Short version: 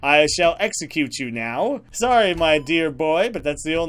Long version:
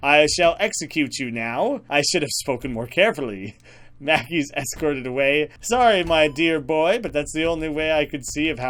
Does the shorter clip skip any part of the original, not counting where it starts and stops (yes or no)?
yes